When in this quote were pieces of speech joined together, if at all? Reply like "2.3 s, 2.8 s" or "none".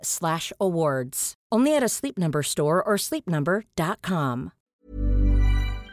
4.8 s